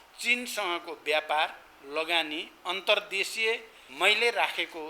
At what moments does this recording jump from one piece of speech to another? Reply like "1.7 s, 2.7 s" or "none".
3.8 s